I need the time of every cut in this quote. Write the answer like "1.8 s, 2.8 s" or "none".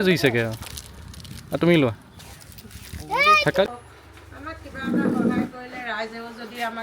3.7 s